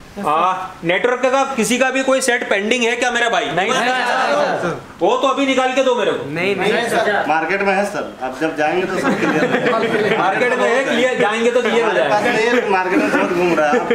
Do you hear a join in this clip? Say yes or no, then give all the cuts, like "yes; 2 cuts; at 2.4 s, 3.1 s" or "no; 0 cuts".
no; 0 cuts